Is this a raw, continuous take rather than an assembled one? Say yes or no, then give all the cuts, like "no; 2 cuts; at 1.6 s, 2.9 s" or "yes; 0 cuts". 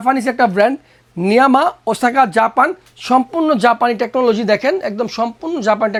yes; 0 cuts